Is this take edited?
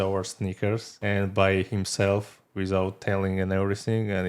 yes; 1 cut; at 1.0 s

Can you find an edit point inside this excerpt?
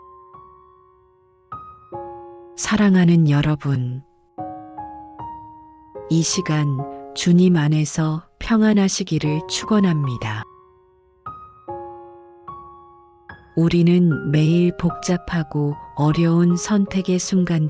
yes; 1 cut; at 2.6 s

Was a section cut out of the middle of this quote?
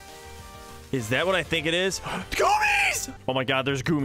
yes; 1 cut; at 3.0 s

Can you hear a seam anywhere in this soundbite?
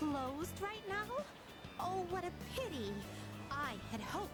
no; 0 cuts

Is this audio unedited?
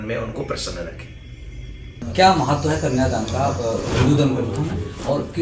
yes; 0 cuts

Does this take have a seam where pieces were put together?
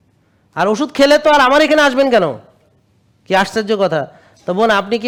no; 0 cuts

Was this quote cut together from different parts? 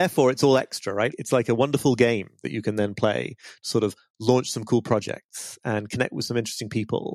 yes; 1 cut; at 1.2 s

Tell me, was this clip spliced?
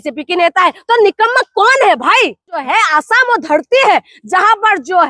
yes; 1 cut; at 2.6 s

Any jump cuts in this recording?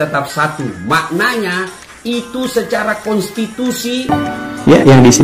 yes; 1 cut; at 4.3 s

